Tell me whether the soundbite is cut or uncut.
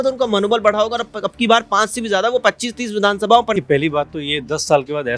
cut